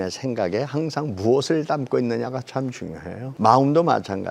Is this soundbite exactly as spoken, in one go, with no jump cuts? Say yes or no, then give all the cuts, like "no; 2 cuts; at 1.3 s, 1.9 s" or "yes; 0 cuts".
no; 1 cut; at 3.2 s